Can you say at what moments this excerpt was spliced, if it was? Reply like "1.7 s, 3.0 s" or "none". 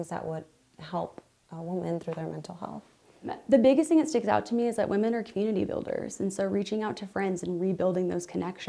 3.4 s